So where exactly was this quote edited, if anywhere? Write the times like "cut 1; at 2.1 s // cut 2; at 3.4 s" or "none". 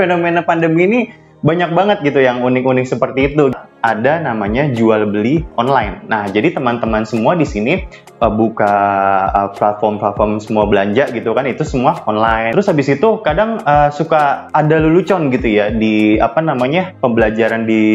cut 1; at 3.5 s // cut 2; at 12.5 s